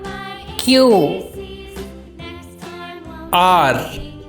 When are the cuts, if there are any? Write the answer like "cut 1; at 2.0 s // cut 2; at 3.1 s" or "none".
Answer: none